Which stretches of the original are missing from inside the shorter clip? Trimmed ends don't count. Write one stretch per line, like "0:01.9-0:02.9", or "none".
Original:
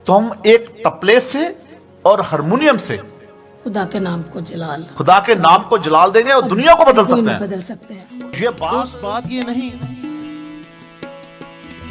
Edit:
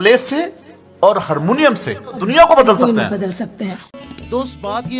0:03.3-0:06.5
0:08.4-0:08.5